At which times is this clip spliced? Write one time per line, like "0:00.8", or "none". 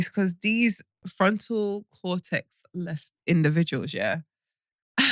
0:01.0